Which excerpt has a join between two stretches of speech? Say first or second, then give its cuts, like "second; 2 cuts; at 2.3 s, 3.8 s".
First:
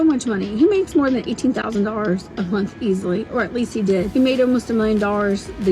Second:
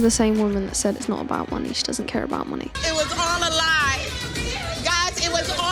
first; 2 cuts; at 1.6 s, 4.1 s